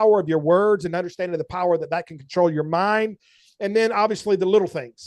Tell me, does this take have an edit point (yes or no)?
no